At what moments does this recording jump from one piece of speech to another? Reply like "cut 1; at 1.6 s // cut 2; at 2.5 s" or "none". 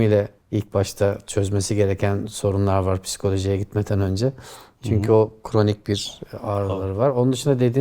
none